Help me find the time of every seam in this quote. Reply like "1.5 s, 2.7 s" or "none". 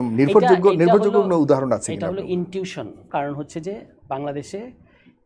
3.1 s

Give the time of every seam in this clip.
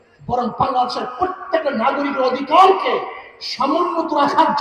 none

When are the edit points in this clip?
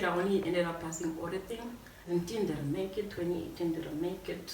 2.1 s

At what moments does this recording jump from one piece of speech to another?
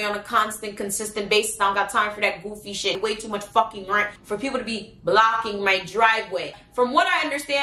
none

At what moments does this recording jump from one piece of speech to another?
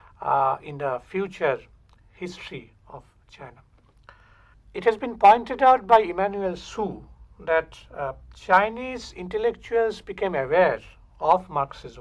4.0 s

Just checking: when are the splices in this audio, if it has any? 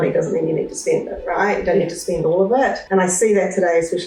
2.8 s

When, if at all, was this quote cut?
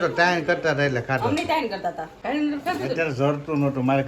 2.1 s

